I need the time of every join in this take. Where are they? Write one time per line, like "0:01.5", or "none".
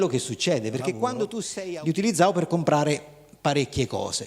0:01.1